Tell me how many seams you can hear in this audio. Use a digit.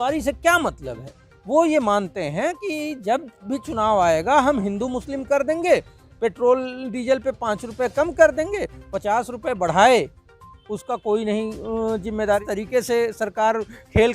1